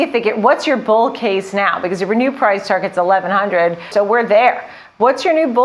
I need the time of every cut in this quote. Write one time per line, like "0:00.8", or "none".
0:03.9